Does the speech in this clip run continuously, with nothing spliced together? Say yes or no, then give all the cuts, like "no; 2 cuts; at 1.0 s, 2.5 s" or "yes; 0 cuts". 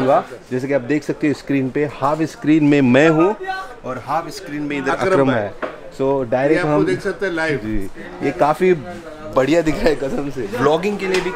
no; 1 cut; at 10.4 s